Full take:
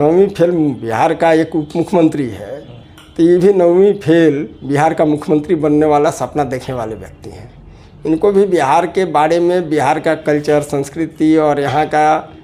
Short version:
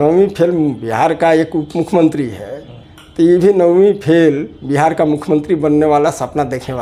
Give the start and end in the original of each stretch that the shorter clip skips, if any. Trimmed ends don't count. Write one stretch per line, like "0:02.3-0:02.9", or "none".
none